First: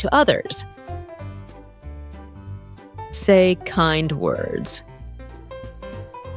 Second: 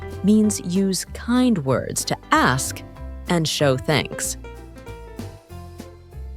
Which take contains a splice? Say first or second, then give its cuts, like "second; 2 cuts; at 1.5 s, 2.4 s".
first; 3 cuts; at 0.8 s, 3.2 s, 4.7 s